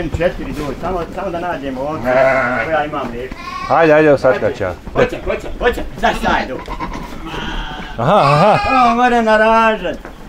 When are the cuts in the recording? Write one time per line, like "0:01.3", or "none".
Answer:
0:04.9

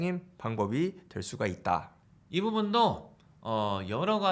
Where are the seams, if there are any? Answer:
none

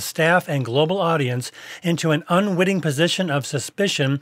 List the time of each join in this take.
none

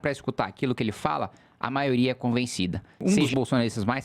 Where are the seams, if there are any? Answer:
0:03.0

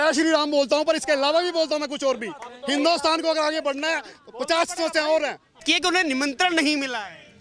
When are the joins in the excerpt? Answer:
0:05.6

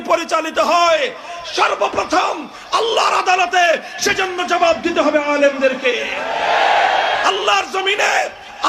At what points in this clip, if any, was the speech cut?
none

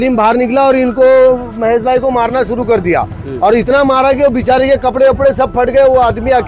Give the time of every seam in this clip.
none

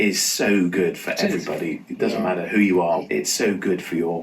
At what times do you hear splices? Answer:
0:03.0

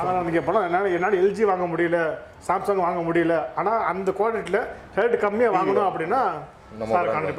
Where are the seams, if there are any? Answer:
none

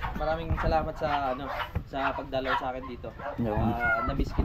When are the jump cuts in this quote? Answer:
none

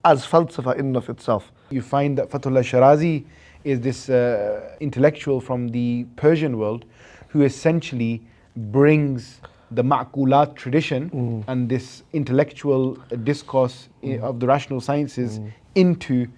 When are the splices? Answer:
0:01.7
0:04.7

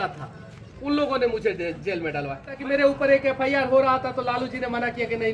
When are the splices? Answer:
0:02.5

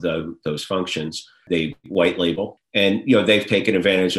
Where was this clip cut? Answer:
0:01.4
0:02.6

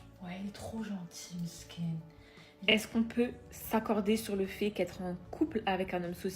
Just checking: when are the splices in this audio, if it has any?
0:02.7

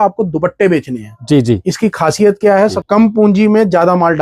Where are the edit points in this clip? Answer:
0:02.8

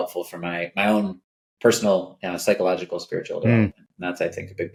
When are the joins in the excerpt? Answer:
none

